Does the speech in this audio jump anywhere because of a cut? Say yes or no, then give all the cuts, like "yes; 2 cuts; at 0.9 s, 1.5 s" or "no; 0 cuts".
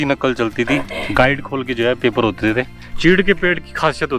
yes; 1 cut; at 2.8 s